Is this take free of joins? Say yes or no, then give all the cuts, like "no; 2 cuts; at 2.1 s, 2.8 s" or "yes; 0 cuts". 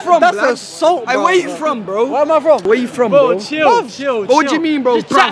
yes; 0 cuts